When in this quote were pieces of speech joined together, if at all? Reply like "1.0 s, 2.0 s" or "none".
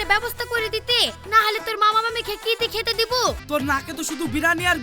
3.4 s